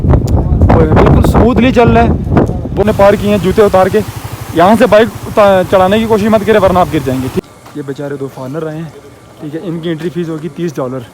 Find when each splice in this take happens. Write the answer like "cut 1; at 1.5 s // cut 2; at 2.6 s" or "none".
cut 1; at 2.8 s // cut 2; at 7.4 s